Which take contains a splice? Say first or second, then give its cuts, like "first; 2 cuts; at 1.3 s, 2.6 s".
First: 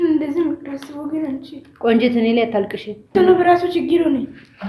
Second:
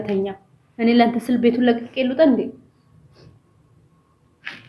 first; 1 cut; at 3.1 s